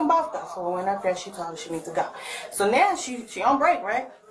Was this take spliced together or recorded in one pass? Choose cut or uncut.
cut